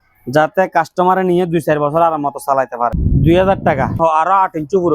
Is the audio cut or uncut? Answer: cut